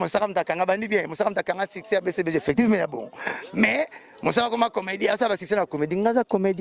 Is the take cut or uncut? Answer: uncut